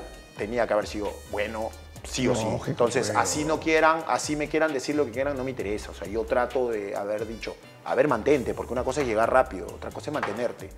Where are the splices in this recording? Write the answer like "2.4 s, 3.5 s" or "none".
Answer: none